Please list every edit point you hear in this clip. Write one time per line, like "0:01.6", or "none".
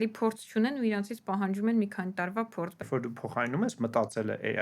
0:02.8

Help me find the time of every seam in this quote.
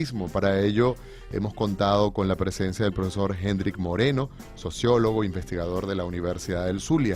0:01.1

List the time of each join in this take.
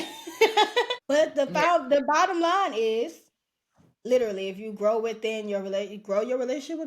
0:01.0

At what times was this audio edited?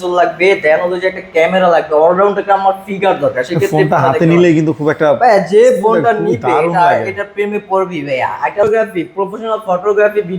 0:08.6

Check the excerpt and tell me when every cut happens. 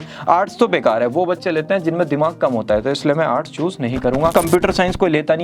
0:04.3

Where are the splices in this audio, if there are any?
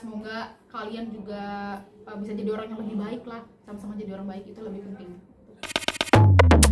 0:05.8

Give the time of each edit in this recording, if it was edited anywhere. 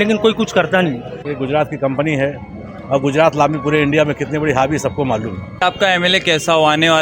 0:01.3
0:05.5

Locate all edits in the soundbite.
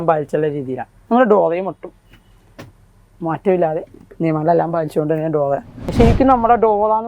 0:05.8

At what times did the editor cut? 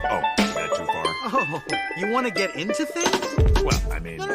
0:00.9

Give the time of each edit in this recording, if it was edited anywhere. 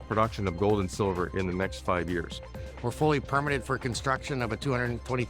0:02.6

